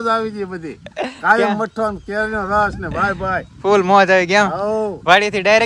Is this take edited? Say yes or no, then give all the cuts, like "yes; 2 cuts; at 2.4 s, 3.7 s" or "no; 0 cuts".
no; 0 cuts